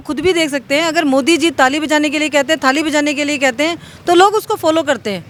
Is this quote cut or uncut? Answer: uncut